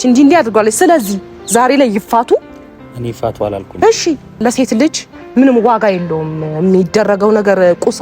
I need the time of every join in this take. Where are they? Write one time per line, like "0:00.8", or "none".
0:04.4